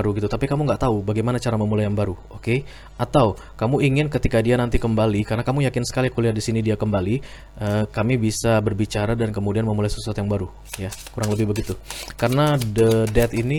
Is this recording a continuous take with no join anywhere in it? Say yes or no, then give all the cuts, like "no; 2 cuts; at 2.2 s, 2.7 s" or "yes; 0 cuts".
yes; 0 cuts